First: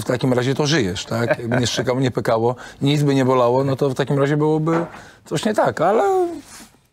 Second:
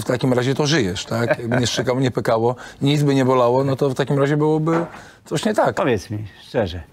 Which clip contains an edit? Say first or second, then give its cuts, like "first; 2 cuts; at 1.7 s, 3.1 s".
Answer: second; 1 cut; at 5.7 s